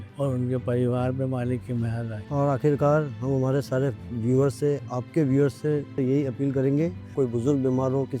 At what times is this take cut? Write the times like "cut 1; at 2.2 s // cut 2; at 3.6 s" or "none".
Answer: cut 1; at 5.9 s // cut 2; at 7.1 s